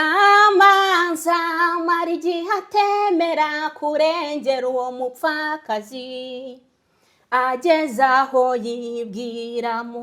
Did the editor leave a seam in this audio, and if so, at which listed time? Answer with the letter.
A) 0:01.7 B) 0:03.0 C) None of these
C